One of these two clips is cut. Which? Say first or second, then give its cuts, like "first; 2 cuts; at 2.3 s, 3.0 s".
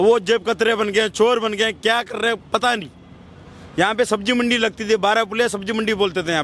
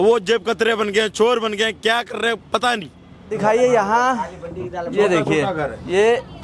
second; 1 cut; at 3.3 s